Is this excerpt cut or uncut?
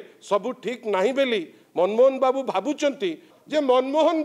cut